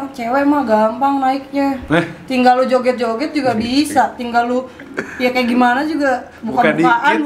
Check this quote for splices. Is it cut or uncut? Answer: uncut